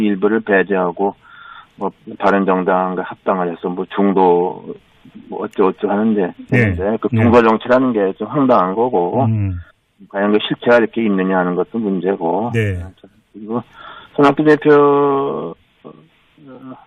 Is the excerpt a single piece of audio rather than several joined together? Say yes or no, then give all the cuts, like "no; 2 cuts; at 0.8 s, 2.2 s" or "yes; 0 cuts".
yes; 0 cuts